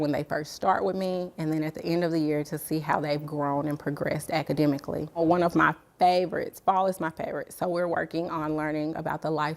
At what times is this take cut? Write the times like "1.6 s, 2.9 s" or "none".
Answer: 5.2 s